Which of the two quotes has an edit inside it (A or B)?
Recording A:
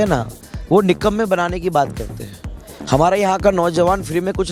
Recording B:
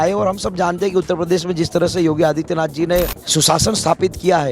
B